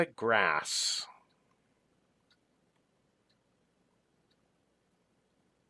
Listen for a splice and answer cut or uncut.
uncut